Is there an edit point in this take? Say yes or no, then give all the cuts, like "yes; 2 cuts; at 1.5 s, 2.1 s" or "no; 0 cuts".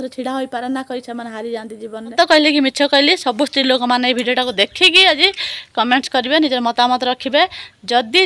yes; 1 cut; at 2.1 s